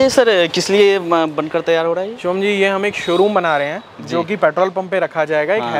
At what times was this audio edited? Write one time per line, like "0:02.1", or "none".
none

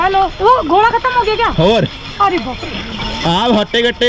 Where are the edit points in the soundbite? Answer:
none

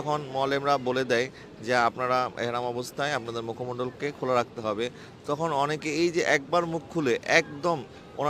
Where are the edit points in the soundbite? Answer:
none

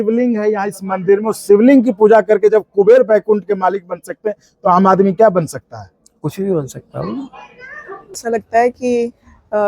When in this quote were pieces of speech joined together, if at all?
0:08.1

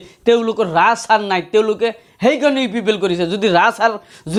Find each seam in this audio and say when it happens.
none

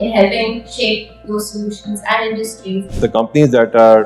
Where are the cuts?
0:02.9

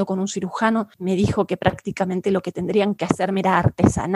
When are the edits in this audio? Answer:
0:00.9

